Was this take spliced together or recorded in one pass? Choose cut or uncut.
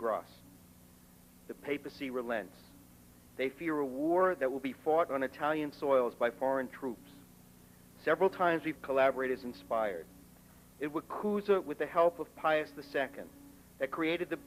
uncut